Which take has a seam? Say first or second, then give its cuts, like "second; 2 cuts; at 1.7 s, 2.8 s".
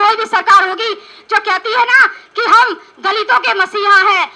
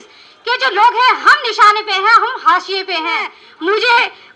second; 1 cut; at 3.4 s